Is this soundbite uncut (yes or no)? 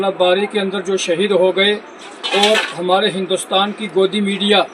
yes